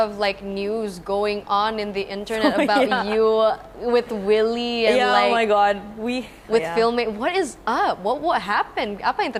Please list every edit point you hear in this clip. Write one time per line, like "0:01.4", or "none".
none

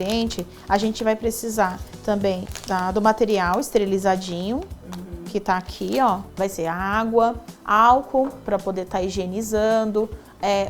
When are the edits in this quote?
0:06.3

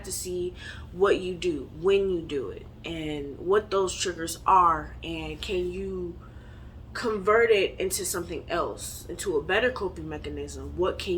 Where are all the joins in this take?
none

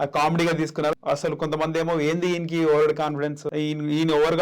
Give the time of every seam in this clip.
0:01.0
0:03.4

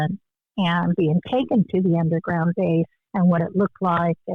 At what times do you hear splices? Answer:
0:03.0

